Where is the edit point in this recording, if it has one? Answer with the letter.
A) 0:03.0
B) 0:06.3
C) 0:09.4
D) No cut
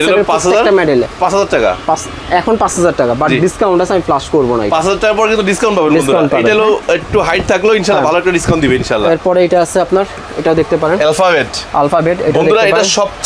D